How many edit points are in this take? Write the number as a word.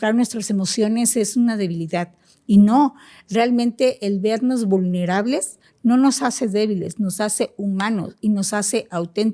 zero